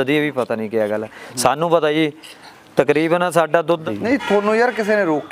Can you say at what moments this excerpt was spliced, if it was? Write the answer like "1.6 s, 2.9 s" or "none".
3.8 s